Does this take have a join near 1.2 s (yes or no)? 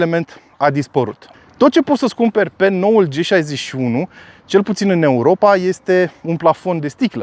yes